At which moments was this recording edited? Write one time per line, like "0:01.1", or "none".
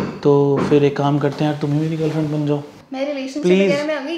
0:02.7